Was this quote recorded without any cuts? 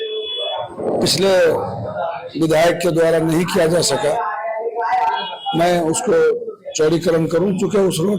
yes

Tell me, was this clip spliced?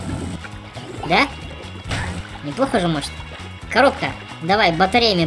no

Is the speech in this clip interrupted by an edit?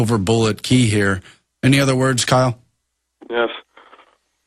yes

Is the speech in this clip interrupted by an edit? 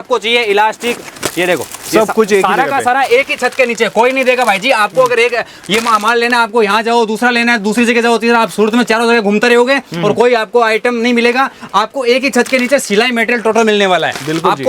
no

